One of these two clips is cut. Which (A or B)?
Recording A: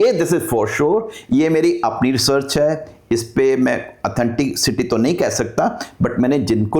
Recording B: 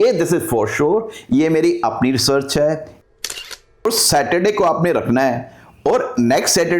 B